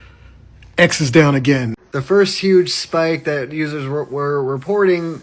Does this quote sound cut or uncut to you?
cut